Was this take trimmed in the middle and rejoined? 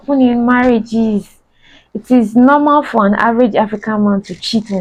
no; 0 cuts

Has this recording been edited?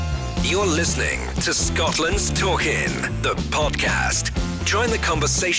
no; 0 cuts

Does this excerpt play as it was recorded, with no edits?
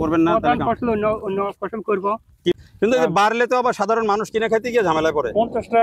no; 1 cut; at 2.5 s

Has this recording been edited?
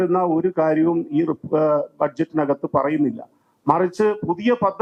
no; 0 cuts

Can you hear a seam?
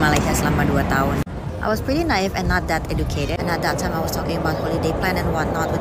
no; 0 cuts

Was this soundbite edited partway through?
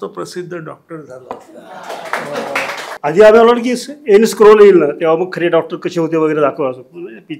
yes; 1 cut; at 2.9 s

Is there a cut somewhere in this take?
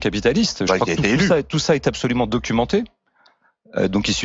no; 0 cuts

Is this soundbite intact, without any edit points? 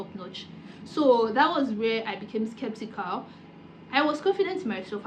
yes; 0 cuts

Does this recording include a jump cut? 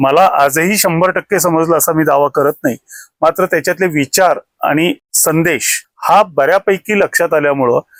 no; 0 cuts

